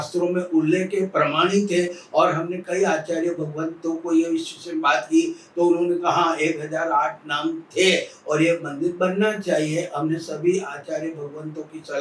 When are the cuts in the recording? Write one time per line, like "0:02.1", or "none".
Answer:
none